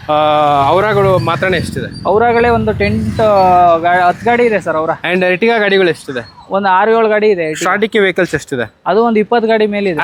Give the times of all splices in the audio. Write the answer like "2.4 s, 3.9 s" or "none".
none